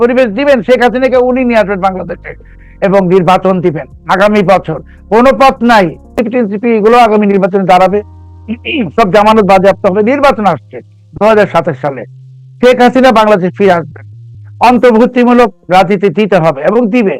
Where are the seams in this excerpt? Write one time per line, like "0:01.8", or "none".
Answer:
0:06.2